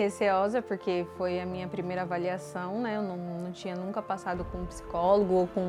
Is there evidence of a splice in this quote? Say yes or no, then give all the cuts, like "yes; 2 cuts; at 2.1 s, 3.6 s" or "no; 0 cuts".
no; 0 cuts